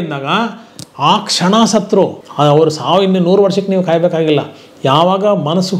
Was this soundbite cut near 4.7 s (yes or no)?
no